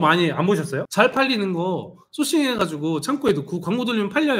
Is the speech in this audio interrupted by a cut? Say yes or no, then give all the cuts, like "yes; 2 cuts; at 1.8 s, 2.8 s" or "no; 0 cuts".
no; 0 cuts